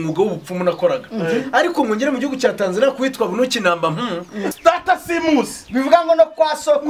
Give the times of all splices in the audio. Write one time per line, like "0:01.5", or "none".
0:04.4